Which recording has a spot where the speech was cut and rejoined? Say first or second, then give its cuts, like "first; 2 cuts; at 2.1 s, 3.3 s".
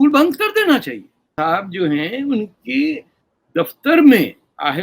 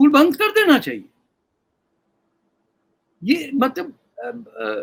first; 1 cut; at 1.2 s